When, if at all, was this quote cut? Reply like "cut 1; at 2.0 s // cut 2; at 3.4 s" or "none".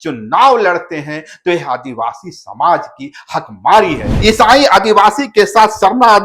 cut 1; at 4.1 s